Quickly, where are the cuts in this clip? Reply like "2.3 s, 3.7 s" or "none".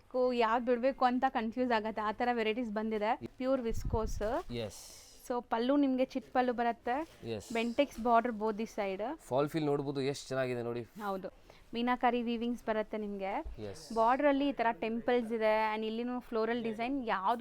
3.3 s, 11.3 s